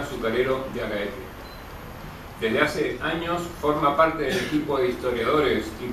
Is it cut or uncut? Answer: uncut